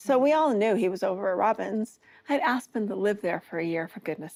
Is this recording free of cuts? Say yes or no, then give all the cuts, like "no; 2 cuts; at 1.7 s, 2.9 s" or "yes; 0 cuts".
yes; 0 cuts